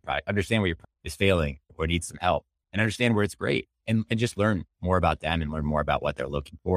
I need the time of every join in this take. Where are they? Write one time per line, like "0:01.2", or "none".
none